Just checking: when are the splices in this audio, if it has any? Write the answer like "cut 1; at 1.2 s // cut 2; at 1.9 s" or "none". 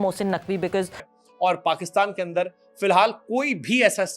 cut 1; at 1.0 s